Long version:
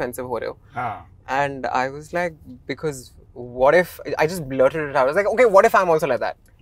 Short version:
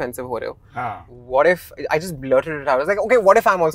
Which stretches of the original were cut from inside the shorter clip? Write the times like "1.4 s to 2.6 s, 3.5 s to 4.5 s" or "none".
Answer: 1.1 s to 3.4 s